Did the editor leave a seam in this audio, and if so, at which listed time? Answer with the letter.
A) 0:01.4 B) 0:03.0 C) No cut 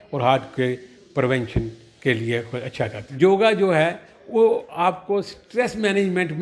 B